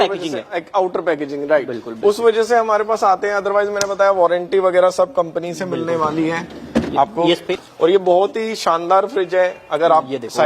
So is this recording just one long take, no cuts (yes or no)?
no